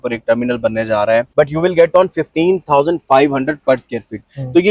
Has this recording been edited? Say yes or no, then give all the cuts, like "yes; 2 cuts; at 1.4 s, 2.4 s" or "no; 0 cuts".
yes; 1 cut; at 1.3 s